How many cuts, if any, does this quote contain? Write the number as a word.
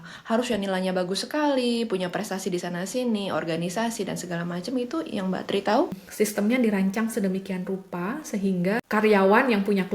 two